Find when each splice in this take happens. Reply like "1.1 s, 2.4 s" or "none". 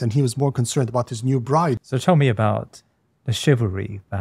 1.8 s